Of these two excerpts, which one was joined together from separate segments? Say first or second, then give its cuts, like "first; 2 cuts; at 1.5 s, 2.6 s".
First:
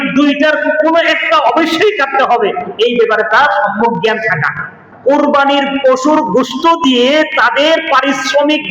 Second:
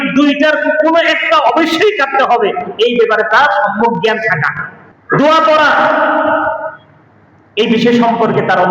first; 1 cut; at 4.9 s